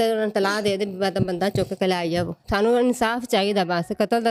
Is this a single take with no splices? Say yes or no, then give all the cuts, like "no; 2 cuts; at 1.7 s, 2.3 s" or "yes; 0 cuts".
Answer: no; 1 cut; at 2.4 s